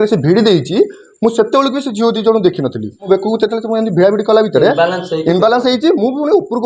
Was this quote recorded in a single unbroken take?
no; 1 cut; at 3.0 s

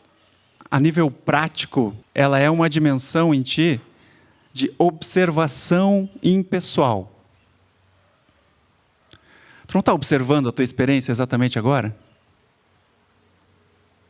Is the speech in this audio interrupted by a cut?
no; 0 cuts

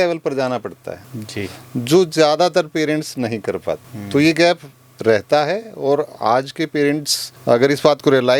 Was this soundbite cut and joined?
no; 0 cuts

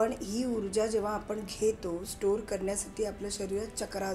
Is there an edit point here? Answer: no; 0 cuts

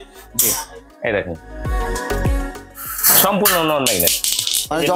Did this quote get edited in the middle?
no; 0 cuts

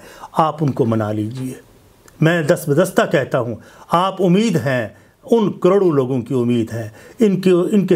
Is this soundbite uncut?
yes; 0 cuts

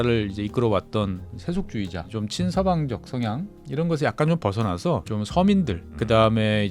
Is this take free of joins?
no; 4 cuts; at 2.1 s, 3.5 s, 5.0 s, 5.9 s

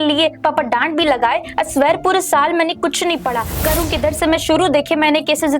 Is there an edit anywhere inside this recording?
yes; 1 cut; at 3.5 s

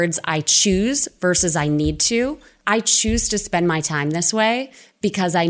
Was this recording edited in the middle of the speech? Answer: no; 0 cuts

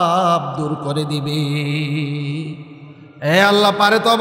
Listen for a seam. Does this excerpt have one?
no; 0 cuts

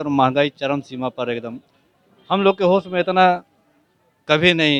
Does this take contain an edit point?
no; 0 cuts

